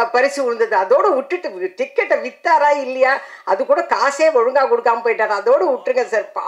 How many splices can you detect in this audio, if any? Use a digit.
0